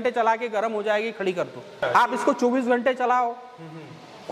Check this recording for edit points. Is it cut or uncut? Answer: uncut